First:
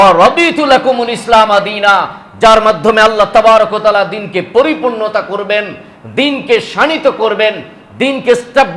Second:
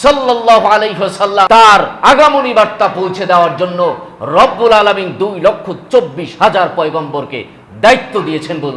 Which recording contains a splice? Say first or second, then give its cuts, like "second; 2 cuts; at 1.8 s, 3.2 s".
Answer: second; 1 cut; at 1.5 s